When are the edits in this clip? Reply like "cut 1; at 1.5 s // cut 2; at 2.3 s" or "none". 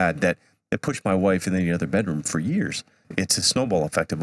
cut 1; at 3.1 s

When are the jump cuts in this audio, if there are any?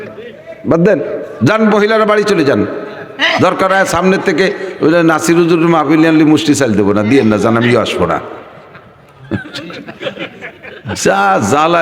none

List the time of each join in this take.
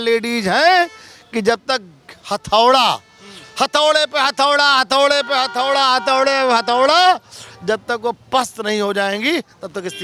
none

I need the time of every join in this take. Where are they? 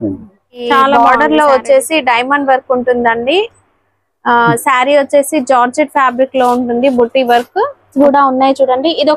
cut 1; at 0.9 s // cut 2; at 7.9 s

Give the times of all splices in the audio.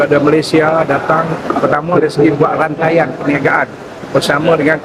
none

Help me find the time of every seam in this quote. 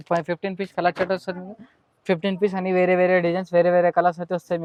none

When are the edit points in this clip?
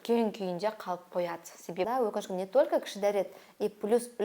cut 1; at 1.9 s

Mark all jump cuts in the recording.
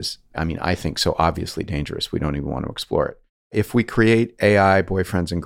cut 1; at 3.5 s

